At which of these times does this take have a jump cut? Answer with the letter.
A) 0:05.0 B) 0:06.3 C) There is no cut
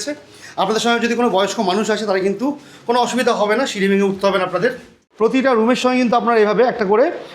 A